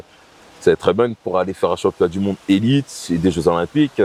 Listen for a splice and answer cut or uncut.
uncut